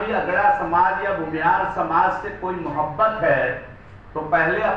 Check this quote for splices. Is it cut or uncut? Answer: uncut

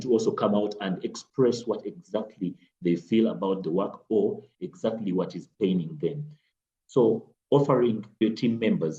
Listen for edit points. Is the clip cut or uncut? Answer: uncut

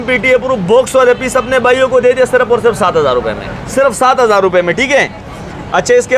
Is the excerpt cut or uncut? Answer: uncut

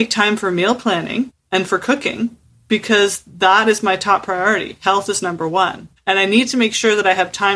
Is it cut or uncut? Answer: cut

